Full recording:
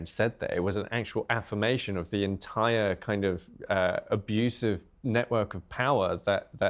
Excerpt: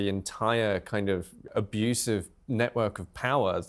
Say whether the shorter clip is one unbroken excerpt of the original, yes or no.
no